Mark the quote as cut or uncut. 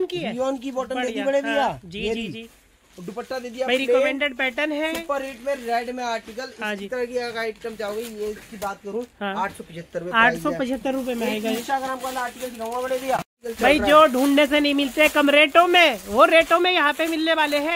uncut